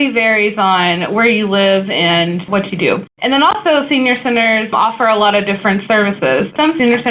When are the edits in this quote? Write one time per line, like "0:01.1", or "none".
0:02.6

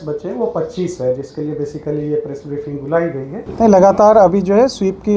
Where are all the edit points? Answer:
0:03.4

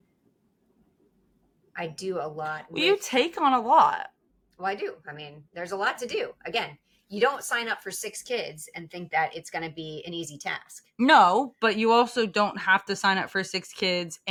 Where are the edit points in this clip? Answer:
none

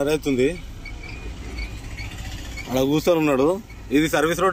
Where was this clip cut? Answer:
none

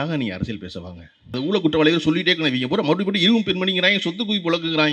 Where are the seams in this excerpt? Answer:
0:01.4

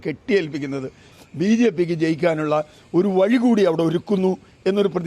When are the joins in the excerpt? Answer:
0:01.1

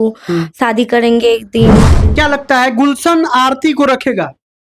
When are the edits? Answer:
0:02.0

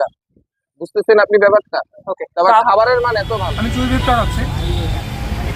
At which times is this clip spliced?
0:03.3

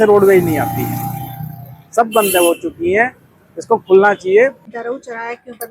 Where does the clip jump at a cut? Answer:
0:04.6

